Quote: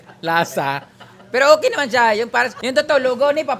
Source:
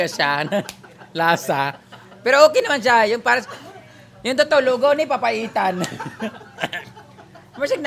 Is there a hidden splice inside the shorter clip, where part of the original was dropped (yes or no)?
yes